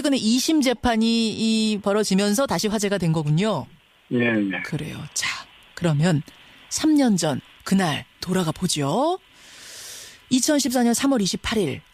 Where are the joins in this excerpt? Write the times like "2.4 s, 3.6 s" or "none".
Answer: 8.0 s